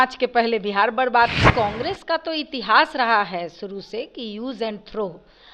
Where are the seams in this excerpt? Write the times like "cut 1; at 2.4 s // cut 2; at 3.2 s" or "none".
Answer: cut 1; at 1.5 s